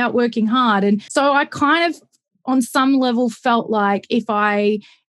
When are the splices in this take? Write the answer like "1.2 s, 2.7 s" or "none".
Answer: 1.1 s